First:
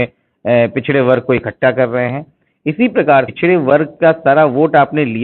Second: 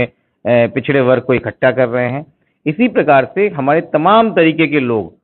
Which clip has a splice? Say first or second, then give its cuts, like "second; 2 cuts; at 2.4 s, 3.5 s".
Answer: first; 1 cut; at 3.3 s